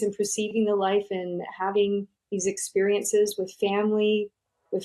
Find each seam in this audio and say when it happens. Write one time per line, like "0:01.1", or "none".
none